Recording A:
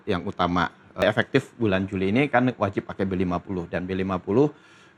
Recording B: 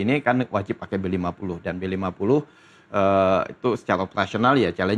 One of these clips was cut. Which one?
A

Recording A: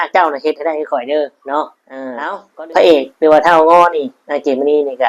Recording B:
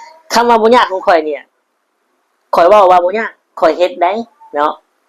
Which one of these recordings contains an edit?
A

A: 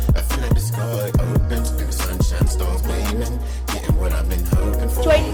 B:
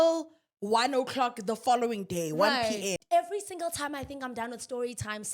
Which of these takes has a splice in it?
B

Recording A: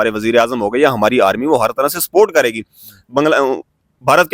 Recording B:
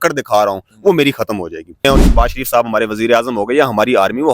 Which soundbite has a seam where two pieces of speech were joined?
B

